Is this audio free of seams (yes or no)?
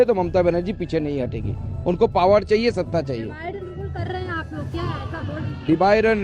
yes